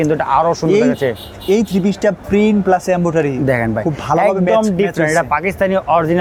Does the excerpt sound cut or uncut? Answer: uncut